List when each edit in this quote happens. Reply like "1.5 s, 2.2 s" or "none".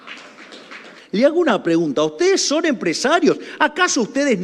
0.9 s